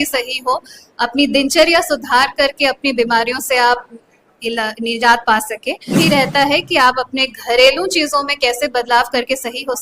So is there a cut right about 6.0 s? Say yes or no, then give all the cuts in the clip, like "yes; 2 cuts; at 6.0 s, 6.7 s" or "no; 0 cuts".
yes; 1 cut; at 6.0 s